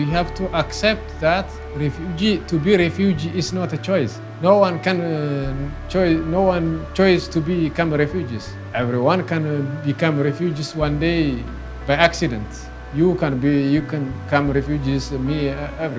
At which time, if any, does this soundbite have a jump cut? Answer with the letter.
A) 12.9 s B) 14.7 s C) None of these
C